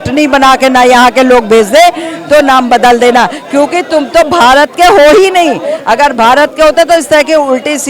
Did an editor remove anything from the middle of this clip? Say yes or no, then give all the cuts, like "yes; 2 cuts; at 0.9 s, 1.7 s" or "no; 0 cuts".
no; 0 cuts